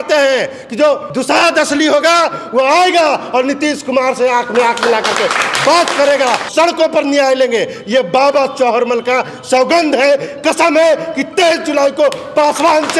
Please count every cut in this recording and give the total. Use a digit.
2